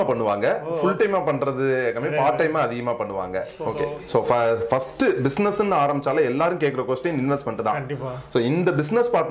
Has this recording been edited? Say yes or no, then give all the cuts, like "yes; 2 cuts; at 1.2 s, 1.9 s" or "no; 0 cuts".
yes; 1 cut; at 3.7 s